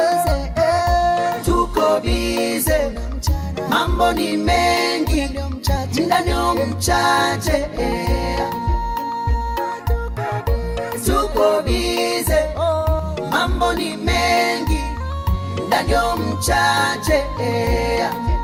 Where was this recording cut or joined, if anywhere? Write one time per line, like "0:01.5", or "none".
none